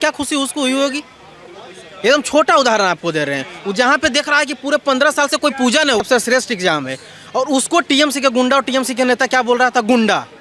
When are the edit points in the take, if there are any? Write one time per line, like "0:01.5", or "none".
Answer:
0:06.0